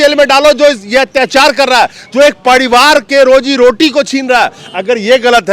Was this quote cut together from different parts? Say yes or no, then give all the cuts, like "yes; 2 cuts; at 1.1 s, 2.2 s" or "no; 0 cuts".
no; 0 cuts